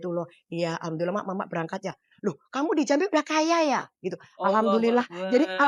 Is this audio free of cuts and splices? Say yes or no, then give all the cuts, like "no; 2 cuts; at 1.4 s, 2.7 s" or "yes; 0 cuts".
yes; 0 cuts